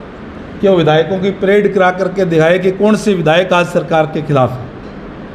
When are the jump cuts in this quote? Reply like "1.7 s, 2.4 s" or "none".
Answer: none